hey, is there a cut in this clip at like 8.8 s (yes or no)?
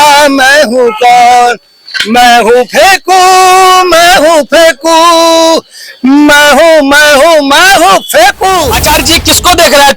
yes